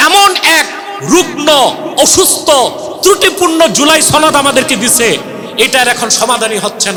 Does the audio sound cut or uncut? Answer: uncut